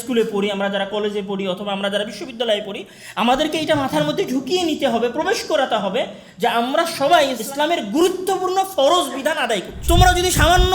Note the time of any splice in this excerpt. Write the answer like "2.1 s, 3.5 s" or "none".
7.4 s, 9.7 s